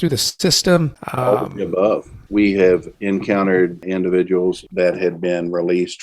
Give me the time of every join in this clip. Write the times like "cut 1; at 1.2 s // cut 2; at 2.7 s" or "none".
cut 1; at 1.0 s // cut 2; at 2.1 s // cut 3; at 2.9 s // cut 4; at 3.8 s // cut 5; at 4.6 s

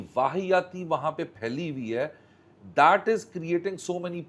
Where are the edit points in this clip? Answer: none

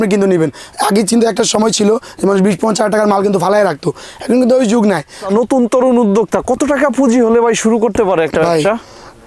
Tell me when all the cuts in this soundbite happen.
cut 1; at 5.2 s

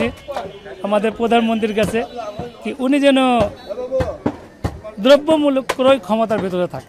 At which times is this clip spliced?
none

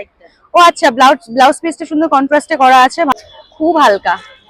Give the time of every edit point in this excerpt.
cut 1; at 3.2 s

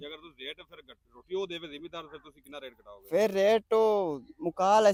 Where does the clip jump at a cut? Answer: none

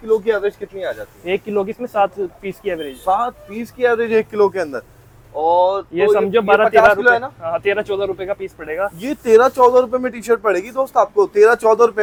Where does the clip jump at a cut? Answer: none

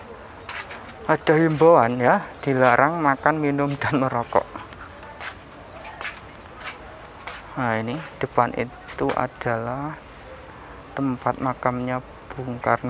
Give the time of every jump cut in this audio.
none

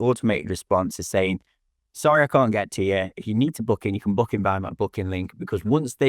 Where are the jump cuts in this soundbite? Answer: none

